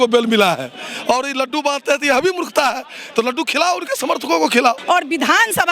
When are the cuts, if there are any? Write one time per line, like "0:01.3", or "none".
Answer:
0:04.8